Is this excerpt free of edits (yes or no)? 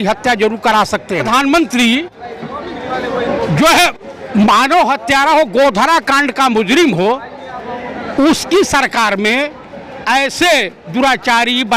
no